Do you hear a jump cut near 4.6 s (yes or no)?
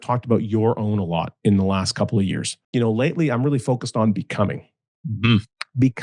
no